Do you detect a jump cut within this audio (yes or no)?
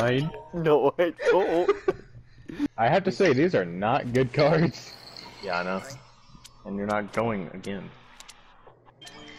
yes